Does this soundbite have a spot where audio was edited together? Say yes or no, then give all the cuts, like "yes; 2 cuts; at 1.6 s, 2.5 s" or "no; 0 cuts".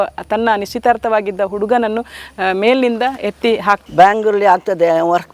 yes; 1 cut; at 3.8 s